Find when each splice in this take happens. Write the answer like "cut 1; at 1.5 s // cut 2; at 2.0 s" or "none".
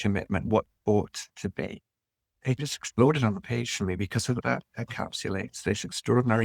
cut 1; at 2.4 s // cut 2; at 4.4 s